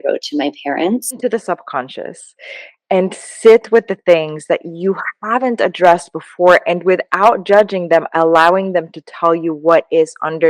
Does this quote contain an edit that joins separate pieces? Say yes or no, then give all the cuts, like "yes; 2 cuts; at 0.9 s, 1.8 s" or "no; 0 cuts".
yes; 1 cut; at 1.2 s